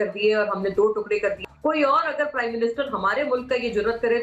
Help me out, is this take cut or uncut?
cut